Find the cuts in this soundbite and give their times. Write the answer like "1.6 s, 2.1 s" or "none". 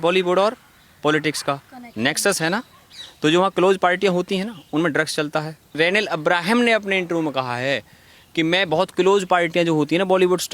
5.7 s